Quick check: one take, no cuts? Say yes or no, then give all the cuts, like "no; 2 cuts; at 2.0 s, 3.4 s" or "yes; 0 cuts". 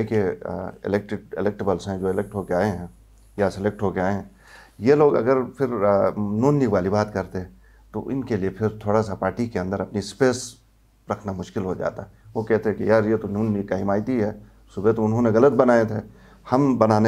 yes; 0 cuts